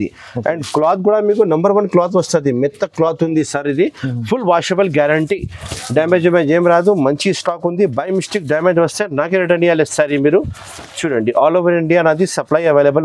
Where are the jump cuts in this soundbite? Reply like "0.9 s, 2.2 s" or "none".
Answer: none